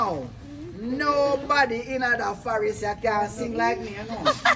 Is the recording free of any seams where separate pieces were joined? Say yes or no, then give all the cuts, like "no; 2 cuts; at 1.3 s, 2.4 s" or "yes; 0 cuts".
yes; 0 cuts